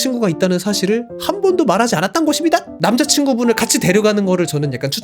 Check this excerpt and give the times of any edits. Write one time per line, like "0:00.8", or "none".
0:02.7